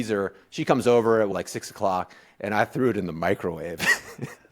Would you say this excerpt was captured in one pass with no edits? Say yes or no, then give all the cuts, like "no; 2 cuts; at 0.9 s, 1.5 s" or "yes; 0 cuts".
no; 1 cut; at 1.3 s